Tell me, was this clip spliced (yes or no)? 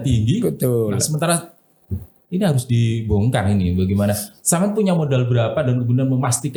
no